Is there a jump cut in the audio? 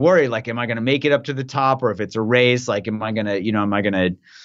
no; 0 cuts

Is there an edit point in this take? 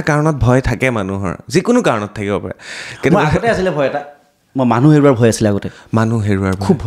no; 0 cuts

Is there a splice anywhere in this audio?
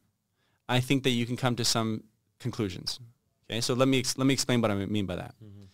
no; 0 cuts

